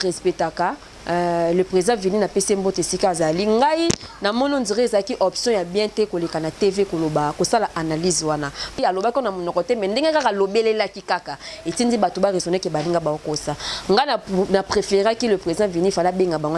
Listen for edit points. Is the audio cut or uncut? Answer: cut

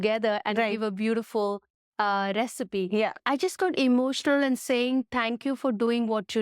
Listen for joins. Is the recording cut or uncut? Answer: cut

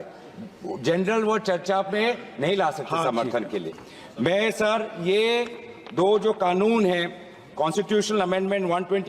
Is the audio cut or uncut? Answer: uncut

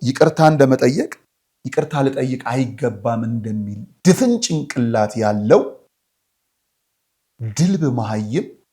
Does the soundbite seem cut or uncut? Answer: uncut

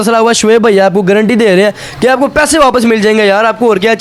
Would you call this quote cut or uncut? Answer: uncut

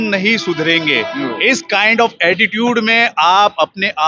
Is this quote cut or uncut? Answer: uncut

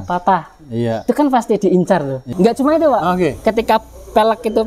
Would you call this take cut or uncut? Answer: cut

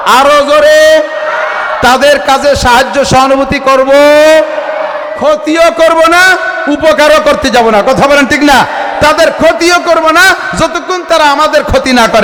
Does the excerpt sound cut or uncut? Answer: uncut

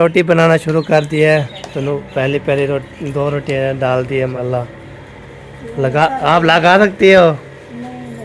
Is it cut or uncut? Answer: cut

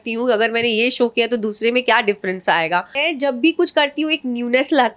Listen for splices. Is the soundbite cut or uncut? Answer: cut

